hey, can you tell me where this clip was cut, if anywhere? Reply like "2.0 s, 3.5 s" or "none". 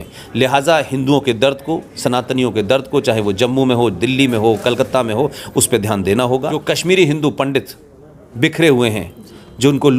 6.6 s